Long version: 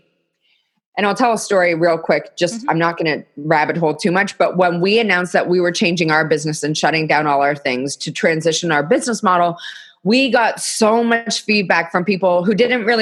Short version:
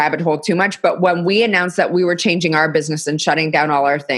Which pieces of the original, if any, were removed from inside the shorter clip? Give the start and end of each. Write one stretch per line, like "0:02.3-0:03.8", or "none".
none